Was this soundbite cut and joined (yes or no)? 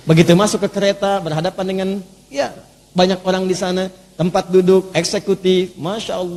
no